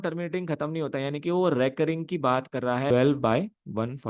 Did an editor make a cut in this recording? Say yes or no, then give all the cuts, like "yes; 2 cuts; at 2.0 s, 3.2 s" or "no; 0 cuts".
yes; 1 cut; at 2.9 s